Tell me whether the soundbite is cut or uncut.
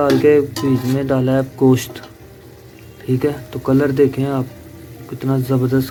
uncut